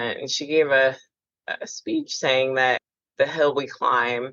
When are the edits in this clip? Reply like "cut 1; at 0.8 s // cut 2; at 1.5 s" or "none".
cut 1; at 2.8 s

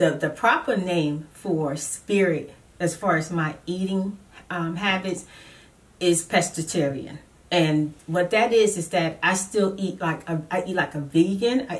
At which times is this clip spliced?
none

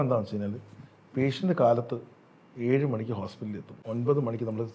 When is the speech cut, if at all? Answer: cut 1; at 3.8 s

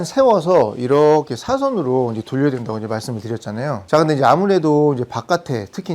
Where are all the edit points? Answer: none

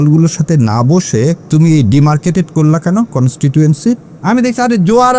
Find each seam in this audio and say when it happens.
cut 1; at 1.4 s // cut 2; at 4.1 s

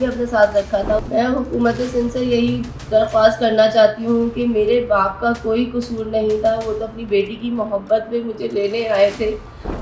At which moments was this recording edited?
cut 1; at 1.1 s

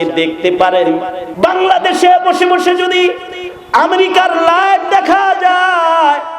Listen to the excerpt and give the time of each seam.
cut 1; at 1.2 s

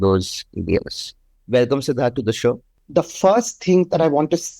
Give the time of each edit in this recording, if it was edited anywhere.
cut 1; at 2.8 s

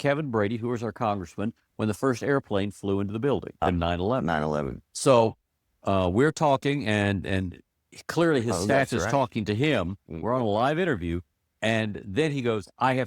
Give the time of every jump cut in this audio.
cut 1; at 3.6 s // cut 2; at 4.8 s

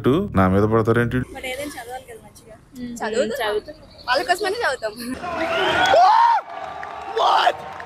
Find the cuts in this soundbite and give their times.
cut 1; at 1.3 s

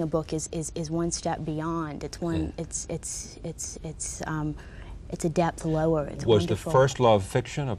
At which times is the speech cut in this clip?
cut 1; at 4.9 s

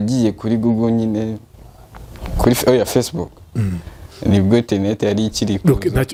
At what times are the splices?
none

